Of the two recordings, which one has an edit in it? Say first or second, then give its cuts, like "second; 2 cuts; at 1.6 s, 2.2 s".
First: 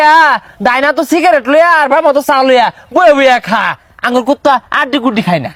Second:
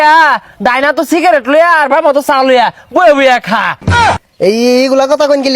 second; 1 cut; at 4.1 s